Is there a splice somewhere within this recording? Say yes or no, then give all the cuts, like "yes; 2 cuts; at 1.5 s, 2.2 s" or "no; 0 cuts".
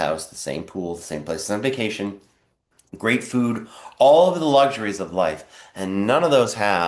no; 0 cuts